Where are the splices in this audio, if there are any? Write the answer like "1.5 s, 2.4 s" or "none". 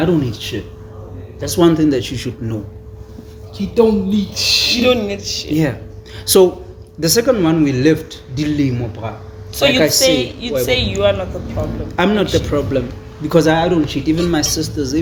none